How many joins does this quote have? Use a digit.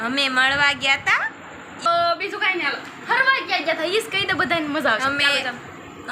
1